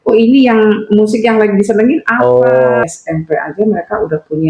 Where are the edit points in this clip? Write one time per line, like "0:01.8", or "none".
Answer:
0:02.8